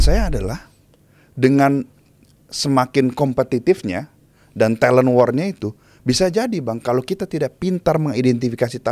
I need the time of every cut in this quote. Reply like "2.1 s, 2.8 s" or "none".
none